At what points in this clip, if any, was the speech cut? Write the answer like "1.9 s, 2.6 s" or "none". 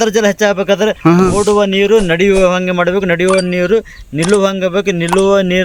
none